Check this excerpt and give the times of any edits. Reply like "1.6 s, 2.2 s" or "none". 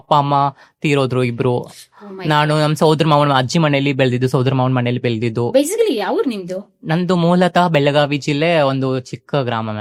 none